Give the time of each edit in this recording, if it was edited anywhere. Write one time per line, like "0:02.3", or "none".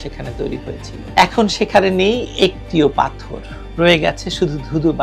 0:01.0